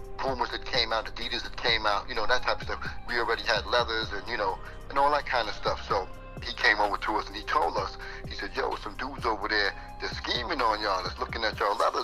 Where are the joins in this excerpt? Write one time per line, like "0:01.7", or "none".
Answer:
0:06.5